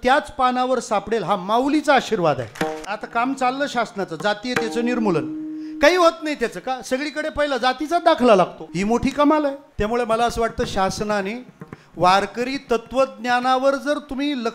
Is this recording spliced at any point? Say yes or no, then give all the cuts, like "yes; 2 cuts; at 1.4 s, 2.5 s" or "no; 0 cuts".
yes; 3 cuts; at 2.8 s, 8.6 s, 9.6 s